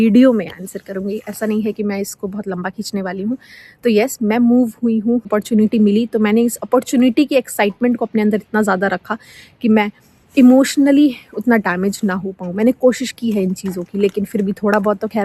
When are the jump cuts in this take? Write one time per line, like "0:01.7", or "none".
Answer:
0:05.3